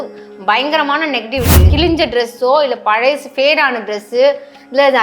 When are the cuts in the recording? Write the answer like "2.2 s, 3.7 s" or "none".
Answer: 1.7 s